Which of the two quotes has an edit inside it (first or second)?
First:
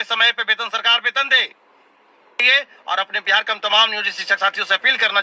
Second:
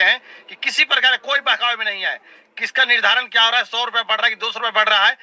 first